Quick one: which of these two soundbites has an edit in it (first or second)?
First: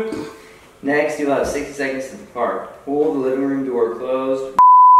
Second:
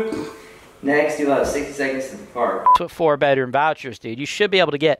second